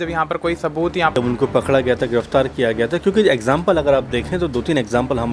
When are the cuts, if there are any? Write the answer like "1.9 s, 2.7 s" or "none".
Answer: 1.2 s